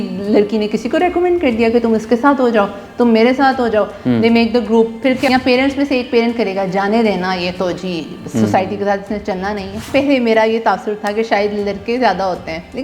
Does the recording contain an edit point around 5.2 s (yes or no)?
yes